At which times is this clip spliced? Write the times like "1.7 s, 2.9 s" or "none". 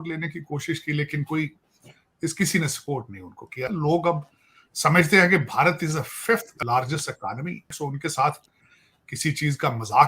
3.7 s, 6.5 s, 7.7 s